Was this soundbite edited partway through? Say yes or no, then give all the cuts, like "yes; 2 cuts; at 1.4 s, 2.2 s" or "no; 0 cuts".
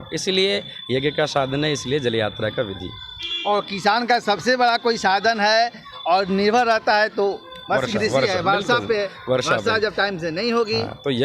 no; 0 cuts